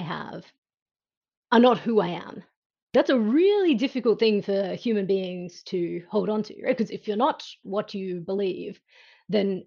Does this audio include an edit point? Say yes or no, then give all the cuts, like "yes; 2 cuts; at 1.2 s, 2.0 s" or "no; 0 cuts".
yes; 2 cuts; at 2.9 s, 7.0 s